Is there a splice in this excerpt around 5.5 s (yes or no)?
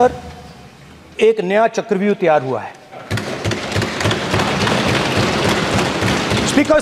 no